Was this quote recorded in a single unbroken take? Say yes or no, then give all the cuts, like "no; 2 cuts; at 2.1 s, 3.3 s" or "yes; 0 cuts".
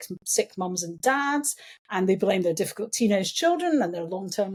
yes; 0 cuts